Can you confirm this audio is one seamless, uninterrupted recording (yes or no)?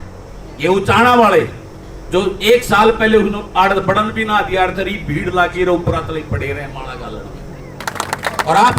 no